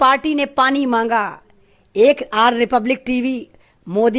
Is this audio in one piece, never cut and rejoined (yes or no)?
yes